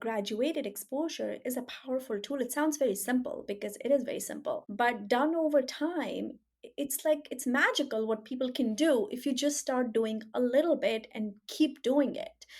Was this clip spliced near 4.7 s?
yes; 1 cut; at 4.7 s

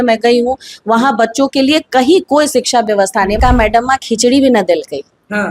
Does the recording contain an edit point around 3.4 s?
yes; 1 cut; at 3.4 s

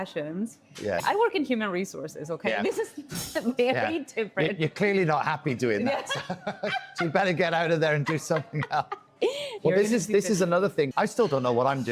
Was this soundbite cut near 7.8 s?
no; 1 cut; at 9.5 s

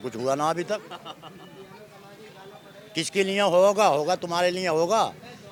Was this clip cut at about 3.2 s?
no; 0 cuts

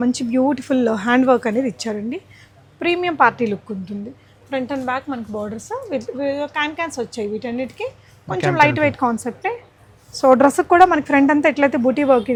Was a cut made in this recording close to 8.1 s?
no; 0 cuts

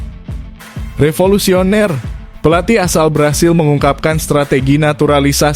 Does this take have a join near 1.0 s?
yes; 1 cut; at 1.0 s

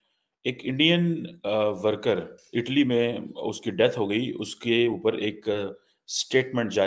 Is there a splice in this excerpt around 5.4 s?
no; 1 cut; at 2.4 s

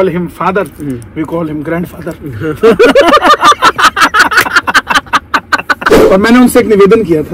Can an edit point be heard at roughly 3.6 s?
no; 1 cut; at 5.9 s

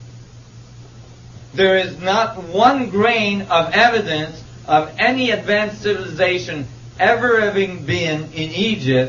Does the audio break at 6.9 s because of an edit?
no; 1 cut; at 1.4 s

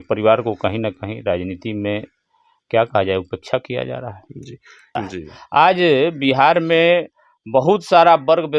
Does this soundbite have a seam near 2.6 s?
no; 1 cut; at 4.8 s

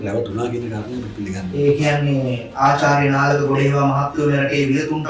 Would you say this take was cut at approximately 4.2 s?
no; 0 cuts

